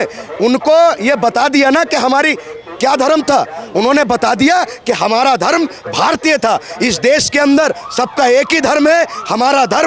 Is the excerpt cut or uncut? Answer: uncut